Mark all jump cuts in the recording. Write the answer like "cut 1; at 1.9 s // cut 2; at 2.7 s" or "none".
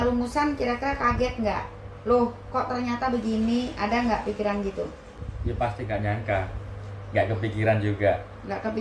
cut 1; at 5.3 s